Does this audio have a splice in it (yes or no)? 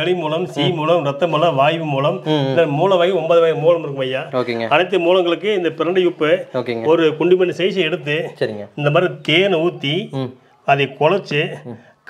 no